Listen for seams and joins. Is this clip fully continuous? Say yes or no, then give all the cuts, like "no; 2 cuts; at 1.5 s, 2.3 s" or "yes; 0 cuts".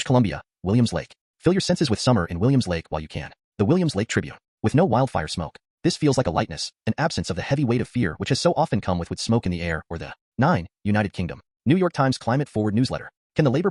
yes; 0 cuts